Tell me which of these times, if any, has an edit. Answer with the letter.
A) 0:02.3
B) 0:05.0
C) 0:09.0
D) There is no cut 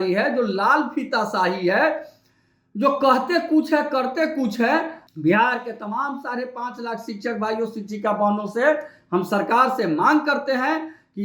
B